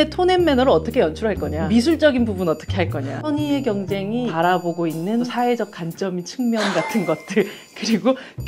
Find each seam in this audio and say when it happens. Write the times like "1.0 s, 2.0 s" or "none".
1.5 s, 3.2 s, 4.3 s, 5.3 s